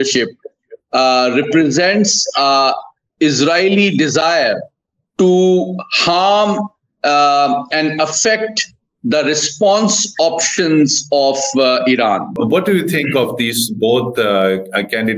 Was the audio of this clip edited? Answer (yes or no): yes